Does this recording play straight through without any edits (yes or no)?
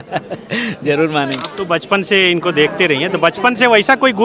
no